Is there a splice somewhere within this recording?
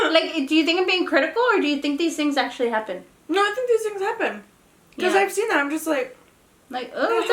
no; 0 cuts

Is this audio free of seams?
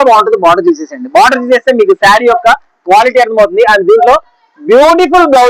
yes; 0 cuts

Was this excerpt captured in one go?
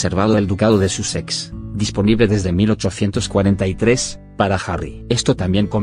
no; 1 cut; at 1.9 s

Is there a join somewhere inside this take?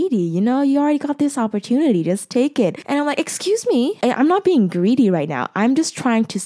yes; 2 cuts; at 2.8 s, 4.0 s

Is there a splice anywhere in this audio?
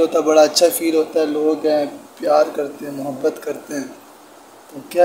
no; 0 cuts

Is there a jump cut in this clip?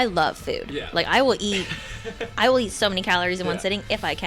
no; 0 cuts

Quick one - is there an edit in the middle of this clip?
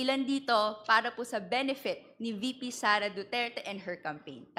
no; 0 cuts

